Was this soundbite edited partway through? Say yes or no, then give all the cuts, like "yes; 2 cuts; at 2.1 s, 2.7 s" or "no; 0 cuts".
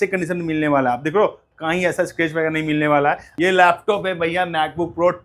yes; 1 cut; at 3.3 s